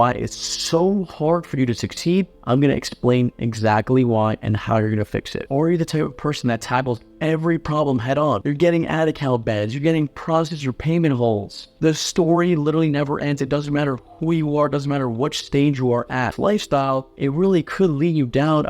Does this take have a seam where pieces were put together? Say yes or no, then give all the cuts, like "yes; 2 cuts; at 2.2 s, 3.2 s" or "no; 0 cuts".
yes; 3 cuts; at 5.4 s, 8.4 s, 16.3 s